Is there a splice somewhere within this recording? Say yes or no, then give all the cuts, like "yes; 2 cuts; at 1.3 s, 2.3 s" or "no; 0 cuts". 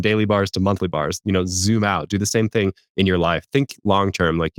no; 0 cuts